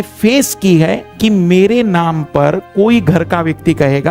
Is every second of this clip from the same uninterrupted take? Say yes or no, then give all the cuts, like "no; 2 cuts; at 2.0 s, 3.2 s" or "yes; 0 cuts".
no; 1 cut; at 1.1 s